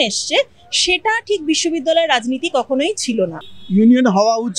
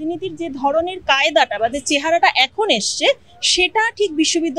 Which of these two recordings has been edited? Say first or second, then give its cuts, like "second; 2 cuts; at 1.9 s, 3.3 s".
first; 1 cut; at 3.4 s